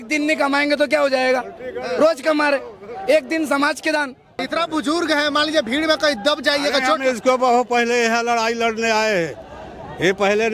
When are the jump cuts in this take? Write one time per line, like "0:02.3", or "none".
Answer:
0:04.5